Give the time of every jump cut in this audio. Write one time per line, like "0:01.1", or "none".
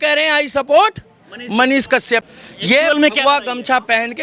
0:02.2